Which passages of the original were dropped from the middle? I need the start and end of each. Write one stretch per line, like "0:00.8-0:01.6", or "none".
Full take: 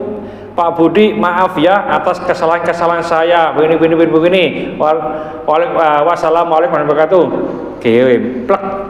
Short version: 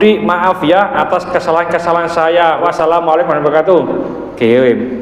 0:03.5-0:06.0

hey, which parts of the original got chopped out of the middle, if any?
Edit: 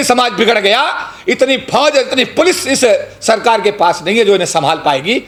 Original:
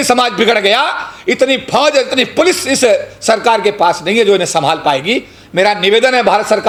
none

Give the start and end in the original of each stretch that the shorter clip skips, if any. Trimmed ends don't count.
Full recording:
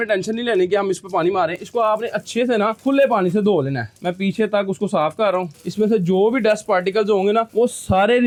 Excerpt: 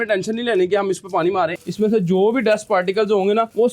0:01.6-0:05.6

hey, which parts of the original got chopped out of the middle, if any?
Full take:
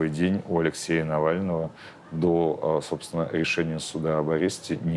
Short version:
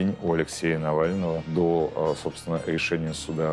0:01.7-0:02.1

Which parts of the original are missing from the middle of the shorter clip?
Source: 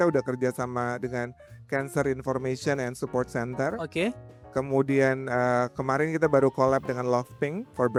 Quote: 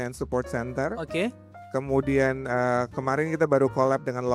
none

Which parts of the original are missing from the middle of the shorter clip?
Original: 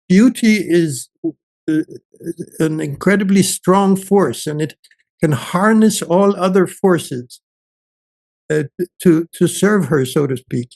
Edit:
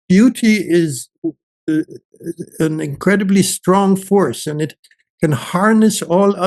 none

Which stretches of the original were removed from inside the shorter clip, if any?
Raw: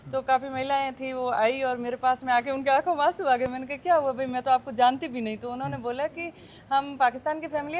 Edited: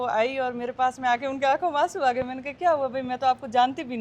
none

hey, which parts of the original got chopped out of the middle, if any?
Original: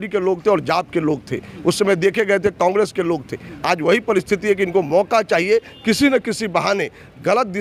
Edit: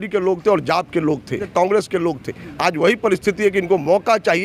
0:01.5-0:02.5

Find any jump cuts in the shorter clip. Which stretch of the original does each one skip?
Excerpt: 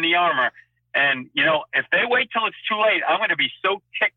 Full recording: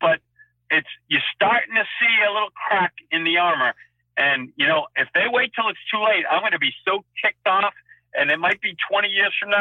none

